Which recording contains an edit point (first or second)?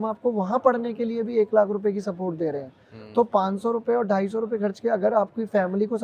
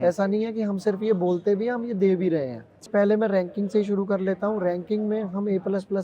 second